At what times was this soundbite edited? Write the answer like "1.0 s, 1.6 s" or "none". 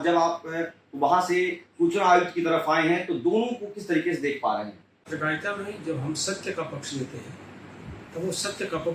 5.1 s